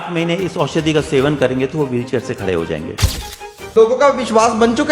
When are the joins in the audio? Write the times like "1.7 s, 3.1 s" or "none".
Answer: 3.3 s